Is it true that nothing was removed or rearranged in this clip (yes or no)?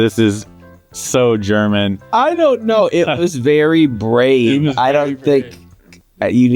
yes